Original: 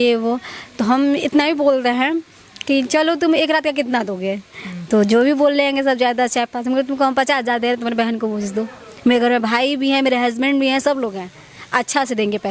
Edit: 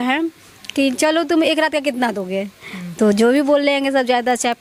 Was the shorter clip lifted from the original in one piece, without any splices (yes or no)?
yes